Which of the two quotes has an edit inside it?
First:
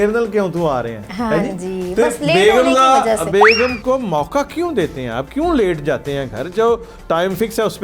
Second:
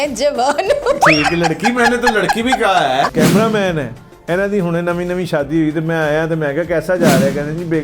second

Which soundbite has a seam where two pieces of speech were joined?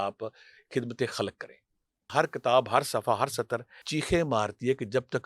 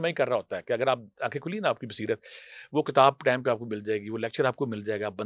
first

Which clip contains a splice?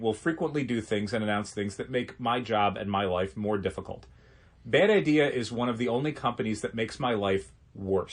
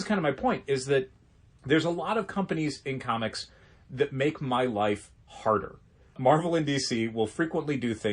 second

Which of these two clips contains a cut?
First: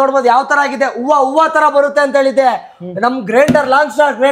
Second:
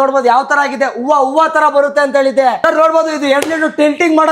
second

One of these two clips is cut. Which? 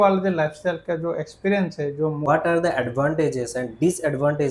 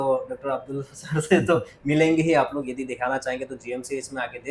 first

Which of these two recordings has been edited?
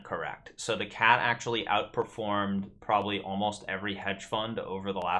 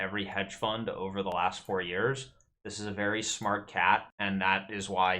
second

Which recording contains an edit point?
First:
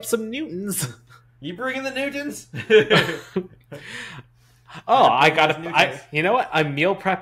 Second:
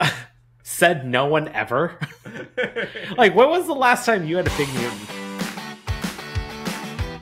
second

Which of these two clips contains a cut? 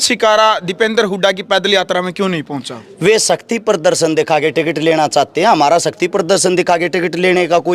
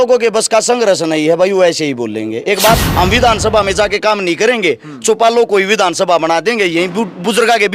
second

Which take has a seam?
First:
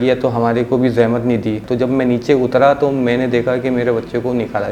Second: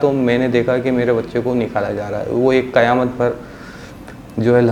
first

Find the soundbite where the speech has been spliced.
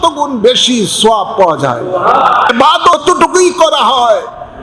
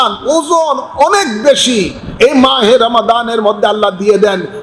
first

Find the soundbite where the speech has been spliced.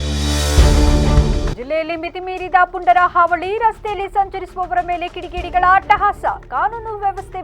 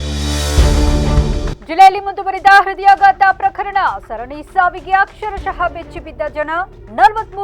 second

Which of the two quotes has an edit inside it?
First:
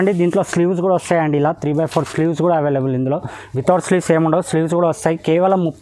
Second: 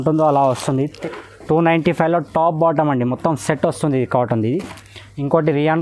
second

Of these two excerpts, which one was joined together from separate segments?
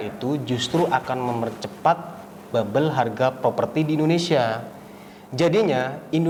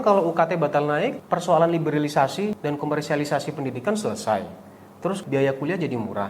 second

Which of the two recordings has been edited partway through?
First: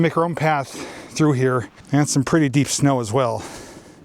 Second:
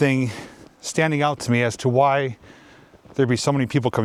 first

